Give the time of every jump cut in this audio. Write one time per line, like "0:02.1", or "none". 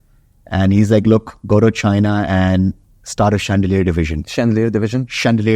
0:04.2